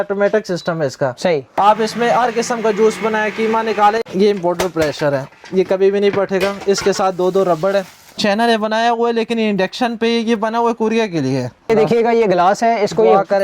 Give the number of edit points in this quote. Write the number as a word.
three